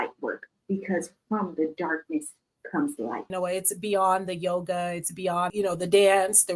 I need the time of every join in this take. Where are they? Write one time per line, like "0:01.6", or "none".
0:03.3
0:05.5

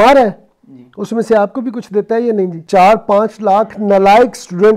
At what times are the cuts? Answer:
0:02.6

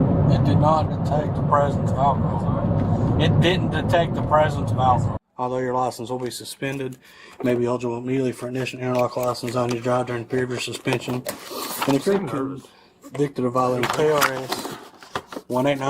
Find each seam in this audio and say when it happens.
0:05.2

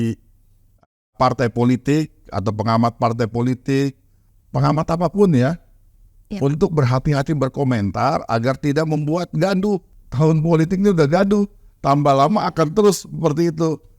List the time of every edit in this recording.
0:04.3

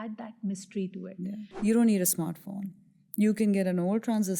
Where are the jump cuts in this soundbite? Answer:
0:01.5

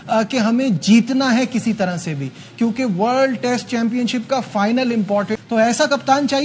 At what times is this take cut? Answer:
0:05.3

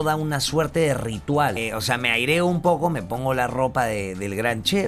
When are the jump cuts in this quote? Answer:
0:01.5

